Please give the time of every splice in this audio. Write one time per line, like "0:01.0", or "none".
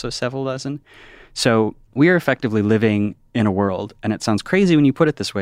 0:01.8